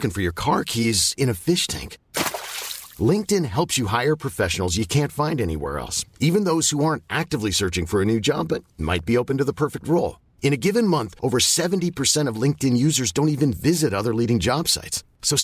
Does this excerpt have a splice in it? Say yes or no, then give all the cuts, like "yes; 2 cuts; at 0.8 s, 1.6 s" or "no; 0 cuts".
no; 0 cuts